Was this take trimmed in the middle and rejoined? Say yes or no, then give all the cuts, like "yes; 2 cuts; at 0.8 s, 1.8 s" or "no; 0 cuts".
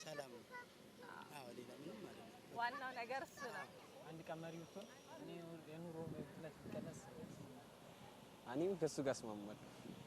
yes; 1 cut; at 3.8 s